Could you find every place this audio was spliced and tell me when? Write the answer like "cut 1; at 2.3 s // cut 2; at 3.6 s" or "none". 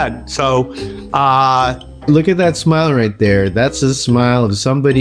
cut 1; at 1.9 s